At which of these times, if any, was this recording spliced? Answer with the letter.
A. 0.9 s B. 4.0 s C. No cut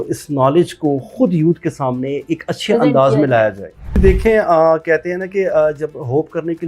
B